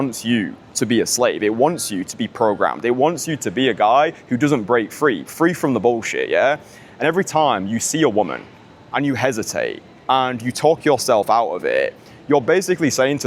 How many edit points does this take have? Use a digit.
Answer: 0